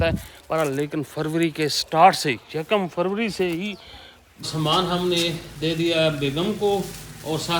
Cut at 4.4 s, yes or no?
yes